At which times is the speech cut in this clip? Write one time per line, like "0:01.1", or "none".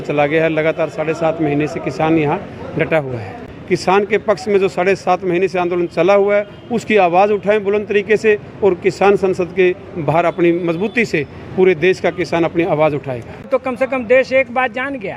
0:03.5
0:13.4